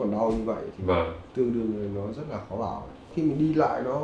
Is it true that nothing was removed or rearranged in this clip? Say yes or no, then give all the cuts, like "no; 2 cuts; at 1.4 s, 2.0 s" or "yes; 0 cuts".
no; 2 cuts; at 1.3 s, 3.1 s